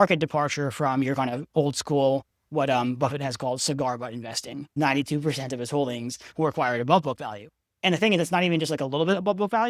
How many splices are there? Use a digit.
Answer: 1